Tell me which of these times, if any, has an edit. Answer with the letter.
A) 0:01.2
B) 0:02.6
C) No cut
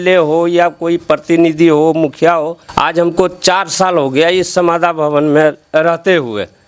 B